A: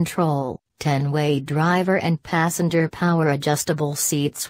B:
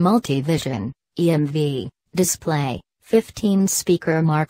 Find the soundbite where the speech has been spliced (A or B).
B